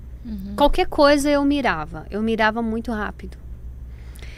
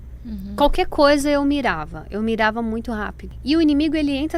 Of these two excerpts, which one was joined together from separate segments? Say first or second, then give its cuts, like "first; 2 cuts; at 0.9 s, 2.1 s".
second; 1 cut; at 3.2 s